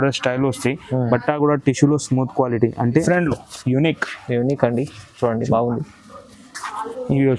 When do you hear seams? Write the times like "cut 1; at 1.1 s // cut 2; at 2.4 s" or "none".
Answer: cut 1; at 3.0 s